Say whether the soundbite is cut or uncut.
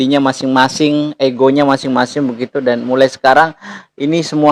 uncut